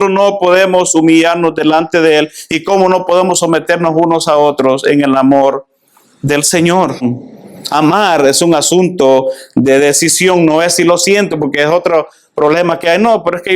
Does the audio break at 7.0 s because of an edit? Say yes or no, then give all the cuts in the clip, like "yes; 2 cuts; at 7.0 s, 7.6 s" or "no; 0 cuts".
yes; 1 cut; at 7.0 s